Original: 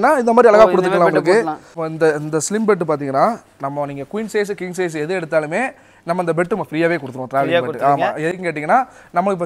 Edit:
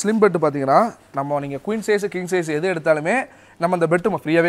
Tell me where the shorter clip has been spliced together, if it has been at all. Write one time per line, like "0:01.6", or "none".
none